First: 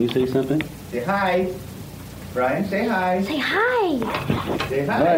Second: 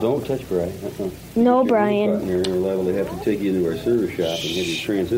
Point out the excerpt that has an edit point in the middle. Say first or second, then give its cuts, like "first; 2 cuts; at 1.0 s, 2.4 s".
second; 2 cuts; at 1.2 s, 2.3 s